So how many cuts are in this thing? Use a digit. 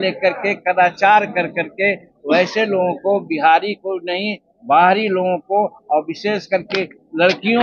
0